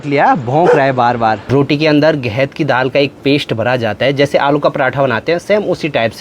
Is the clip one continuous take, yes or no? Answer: no